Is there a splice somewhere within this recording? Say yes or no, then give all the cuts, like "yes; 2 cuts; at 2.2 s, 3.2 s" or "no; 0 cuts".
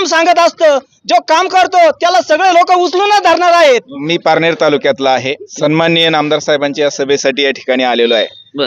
yes; 2 cuts; at 3.9 s, 5.4 s